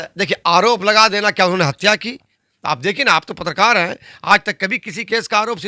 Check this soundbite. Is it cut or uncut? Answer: cut